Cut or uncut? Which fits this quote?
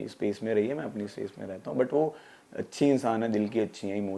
uncut